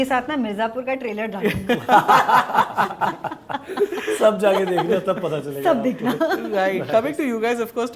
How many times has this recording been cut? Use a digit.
0